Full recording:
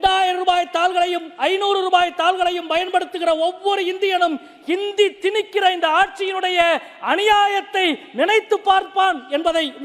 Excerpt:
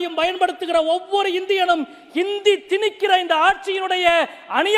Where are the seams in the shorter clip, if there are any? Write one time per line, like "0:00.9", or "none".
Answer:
none